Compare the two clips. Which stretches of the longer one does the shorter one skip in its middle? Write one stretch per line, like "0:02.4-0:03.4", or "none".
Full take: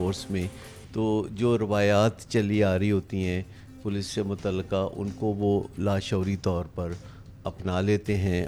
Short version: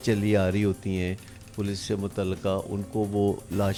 none